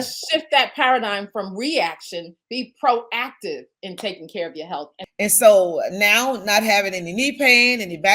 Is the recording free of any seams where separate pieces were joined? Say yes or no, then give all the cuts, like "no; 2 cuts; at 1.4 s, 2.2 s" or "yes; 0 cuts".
no; 2 cuts; at 2.4 s, 5.0 s